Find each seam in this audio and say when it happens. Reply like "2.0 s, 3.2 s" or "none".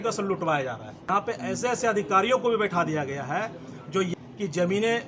1.0 s, 4.1 s